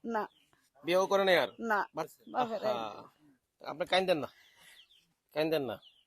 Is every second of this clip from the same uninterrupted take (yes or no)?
no